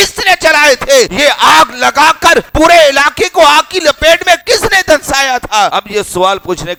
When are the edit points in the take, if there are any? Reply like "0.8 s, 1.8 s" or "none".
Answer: none

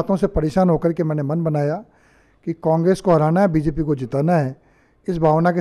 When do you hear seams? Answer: none

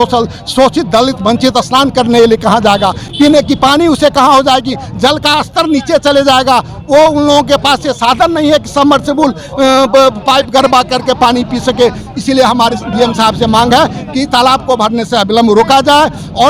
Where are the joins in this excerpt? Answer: none

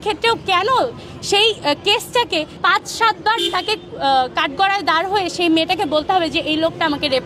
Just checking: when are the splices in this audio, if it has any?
none

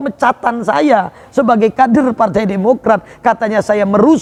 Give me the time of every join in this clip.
none

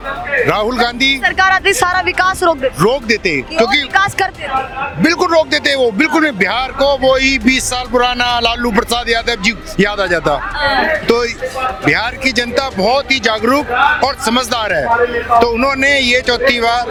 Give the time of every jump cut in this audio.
none

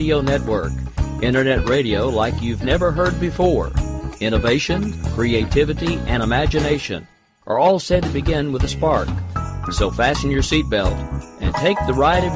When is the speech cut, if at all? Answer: none

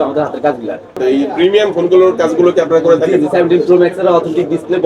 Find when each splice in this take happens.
1.0 s

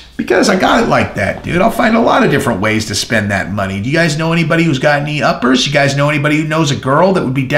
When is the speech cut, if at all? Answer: none

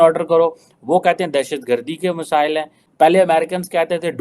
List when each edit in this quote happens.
2.9 s

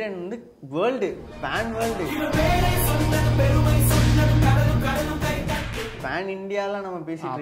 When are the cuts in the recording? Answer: 2.1 s, 6.0 s

